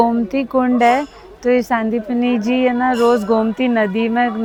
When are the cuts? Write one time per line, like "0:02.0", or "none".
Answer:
none

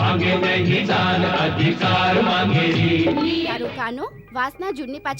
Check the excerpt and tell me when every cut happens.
0:03.5

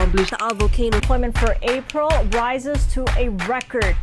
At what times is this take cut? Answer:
0:01.0

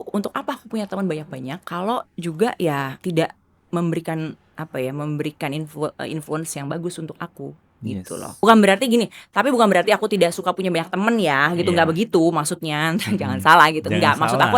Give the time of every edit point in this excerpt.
0:01.6
0:02.9
0:08.4

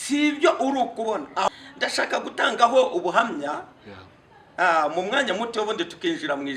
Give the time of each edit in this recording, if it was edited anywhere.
0:01.5

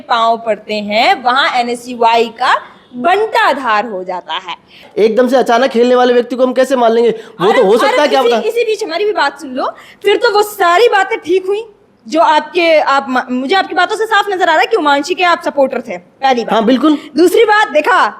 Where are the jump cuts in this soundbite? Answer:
0:04.8

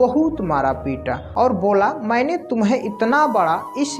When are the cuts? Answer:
0:01.2

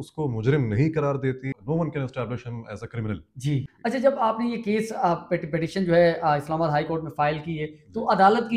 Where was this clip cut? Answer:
0:01.6
0:03.7

